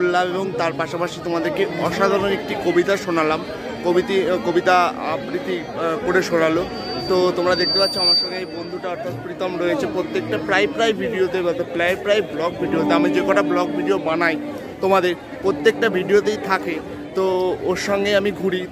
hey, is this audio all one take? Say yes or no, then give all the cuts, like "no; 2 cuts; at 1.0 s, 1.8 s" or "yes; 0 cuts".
yes; 0 cuts